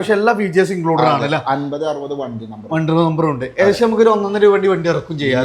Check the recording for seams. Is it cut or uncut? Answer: uncut